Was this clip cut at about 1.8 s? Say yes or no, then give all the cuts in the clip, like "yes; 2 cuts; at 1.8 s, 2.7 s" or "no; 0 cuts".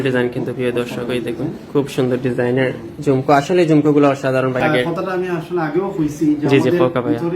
no; 1 cut; at 4.6 s